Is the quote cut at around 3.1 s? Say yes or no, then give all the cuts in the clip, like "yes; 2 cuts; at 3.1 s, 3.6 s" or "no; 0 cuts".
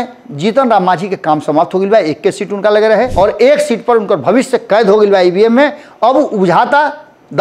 yes; 1 cut; at 3.1 s